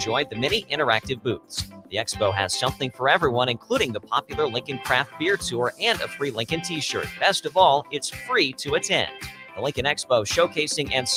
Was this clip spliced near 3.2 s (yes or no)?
no